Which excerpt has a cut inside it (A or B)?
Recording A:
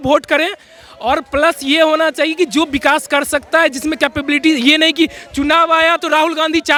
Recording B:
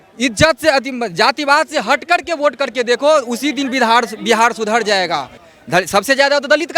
B